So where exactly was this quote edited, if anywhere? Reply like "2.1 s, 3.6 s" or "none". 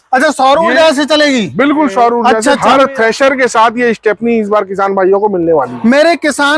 2.3 s